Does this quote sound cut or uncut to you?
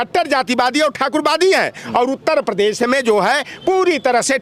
uncut